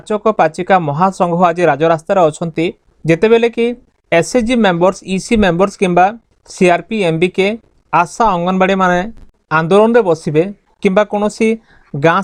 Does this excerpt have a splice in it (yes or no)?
no